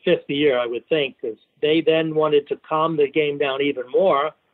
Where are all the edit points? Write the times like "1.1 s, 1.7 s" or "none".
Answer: 1.5 s